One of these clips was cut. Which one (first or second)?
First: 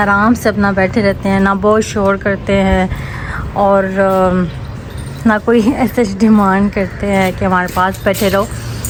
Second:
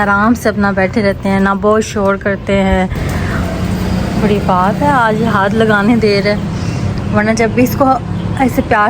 second